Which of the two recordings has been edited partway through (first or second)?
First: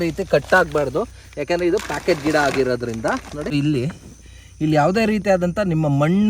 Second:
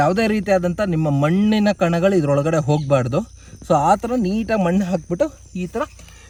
first